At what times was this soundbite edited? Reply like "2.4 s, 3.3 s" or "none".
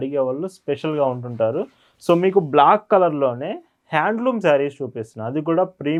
none